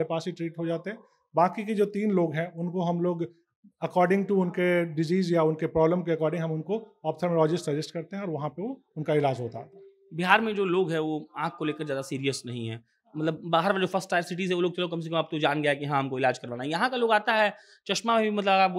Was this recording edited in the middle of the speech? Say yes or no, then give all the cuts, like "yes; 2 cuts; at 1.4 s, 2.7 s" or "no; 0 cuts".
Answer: no; 0 cuts